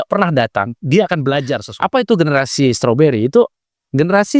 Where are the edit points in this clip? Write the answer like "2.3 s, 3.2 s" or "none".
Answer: 1.6 s

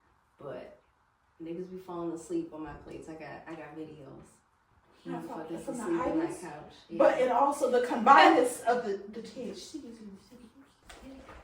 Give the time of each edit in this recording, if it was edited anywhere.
none

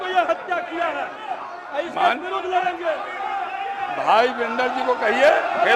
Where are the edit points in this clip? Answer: none

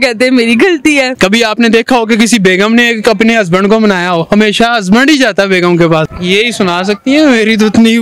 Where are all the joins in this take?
1.1 s, 6.0 s

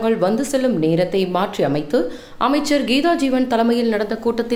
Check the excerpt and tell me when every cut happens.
none

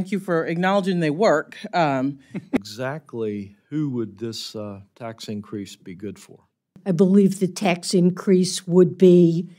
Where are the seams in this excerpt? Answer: 2.6 s, 6.8 s

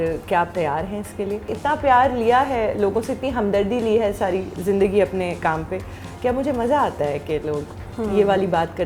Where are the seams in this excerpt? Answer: 1.5 s

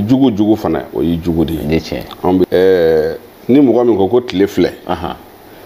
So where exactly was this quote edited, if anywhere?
2.5 s

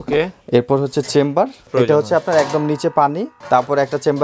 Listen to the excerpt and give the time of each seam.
1.7 s, 3.3 s

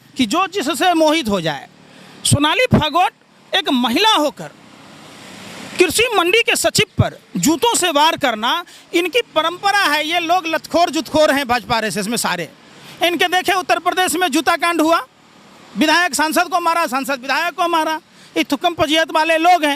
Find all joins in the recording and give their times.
none

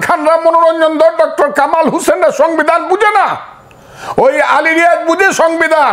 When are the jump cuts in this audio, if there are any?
none

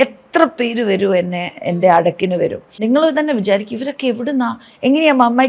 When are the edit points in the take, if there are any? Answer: 2.8 s

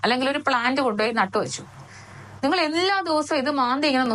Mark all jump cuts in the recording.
none

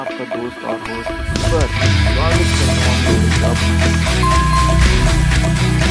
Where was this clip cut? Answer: none

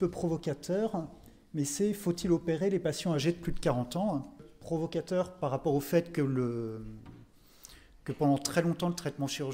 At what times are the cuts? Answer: 4.5 s

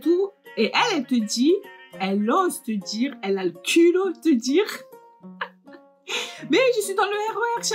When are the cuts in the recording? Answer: none

